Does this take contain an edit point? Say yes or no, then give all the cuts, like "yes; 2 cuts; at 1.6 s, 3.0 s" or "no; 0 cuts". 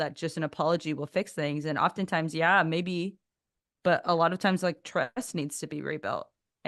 no; 0 cuts